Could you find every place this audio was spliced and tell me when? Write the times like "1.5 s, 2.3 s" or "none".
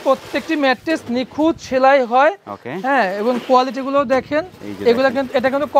none